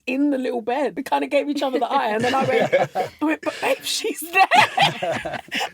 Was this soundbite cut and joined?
yes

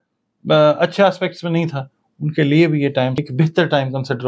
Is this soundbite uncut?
no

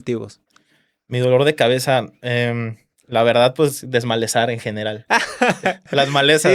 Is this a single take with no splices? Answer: yes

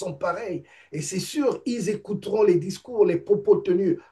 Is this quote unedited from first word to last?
yes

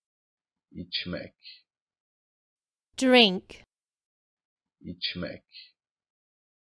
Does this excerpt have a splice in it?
no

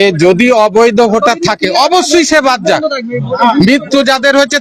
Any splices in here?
no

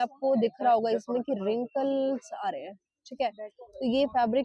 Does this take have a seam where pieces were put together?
no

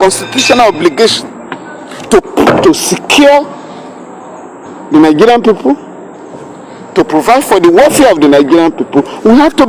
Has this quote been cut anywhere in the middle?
no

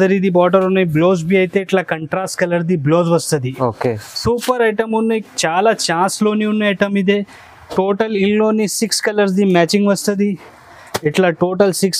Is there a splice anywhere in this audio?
no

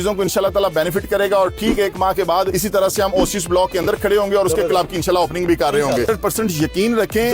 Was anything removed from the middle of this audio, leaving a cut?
yes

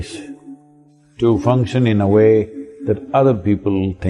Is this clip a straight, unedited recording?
yes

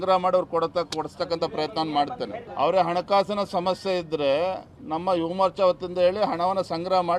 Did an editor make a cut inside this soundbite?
yes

